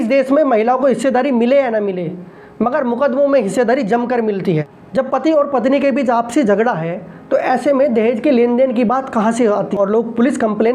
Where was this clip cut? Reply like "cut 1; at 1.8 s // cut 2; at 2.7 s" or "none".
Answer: cut 1; at 4.4 s // cut 2; at 9.8 s